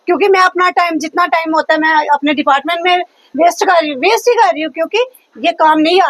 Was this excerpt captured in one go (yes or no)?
yes